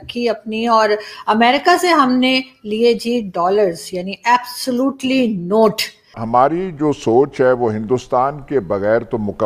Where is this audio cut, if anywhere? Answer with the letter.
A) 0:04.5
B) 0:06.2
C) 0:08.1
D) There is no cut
B